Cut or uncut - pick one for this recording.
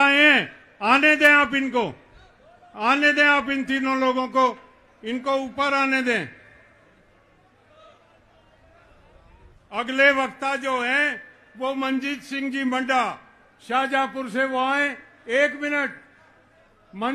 uncut